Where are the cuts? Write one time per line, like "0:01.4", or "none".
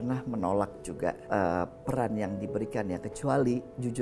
0:01.2